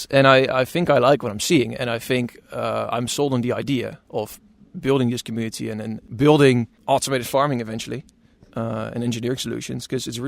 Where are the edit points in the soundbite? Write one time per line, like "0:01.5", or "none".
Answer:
0:06.0
0:06.7